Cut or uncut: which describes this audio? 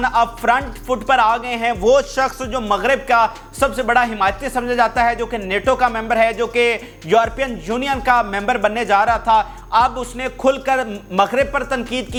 uncut